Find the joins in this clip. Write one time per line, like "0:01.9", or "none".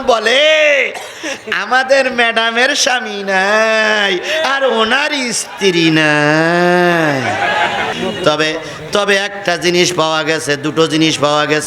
0:07.9